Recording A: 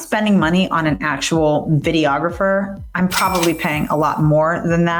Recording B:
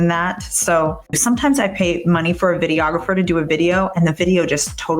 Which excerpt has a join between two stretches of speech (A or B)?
B